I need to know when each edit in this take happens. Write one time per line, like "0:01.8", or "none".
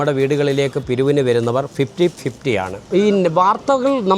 0:02.8